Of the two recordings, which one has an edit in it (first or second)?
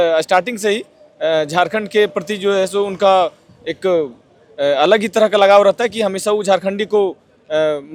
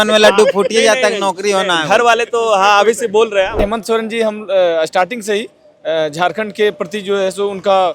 second